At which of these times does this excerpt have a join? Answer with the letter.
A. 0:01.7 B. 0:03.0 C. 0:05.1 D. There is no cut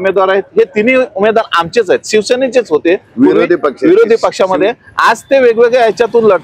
D